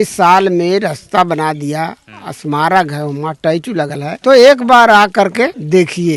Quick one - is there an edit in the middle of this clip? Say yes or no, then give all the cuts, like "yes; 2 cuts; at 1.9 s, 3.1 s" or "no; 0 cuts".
no; 0 cuts